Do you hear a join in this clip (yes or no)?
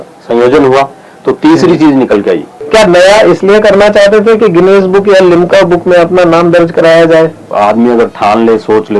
yes